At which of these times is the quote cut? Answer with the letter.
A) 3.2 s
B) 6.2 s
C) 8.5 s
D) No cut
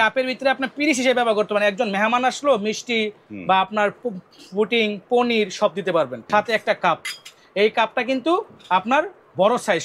B